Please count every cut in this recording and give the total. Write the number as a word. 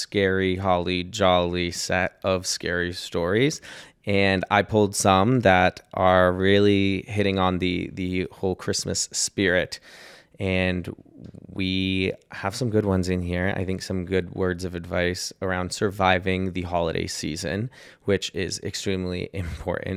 zero